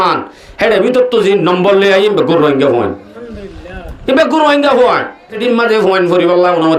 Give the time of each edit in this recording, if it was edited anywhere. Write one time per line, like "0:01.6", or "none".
0:05.4